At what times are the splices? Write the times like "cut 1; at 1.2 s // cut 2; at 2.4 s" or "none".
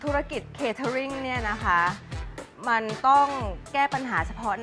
none